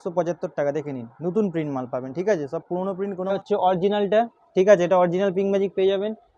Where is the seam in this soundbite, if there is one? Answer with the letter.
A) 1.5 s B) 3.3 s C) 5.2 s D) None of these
B